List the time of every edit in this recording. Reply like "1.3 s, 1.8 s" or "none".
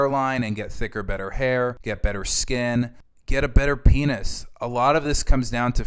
none